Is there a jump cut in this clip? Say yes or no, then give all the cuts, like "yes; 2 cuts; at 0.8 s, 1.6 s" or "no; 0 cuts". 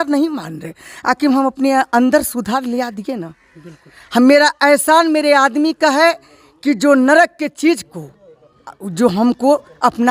no; 0 cuts